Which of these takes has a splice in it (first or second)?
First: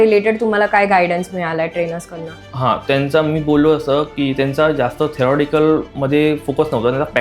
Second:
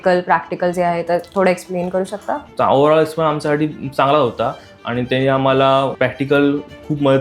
second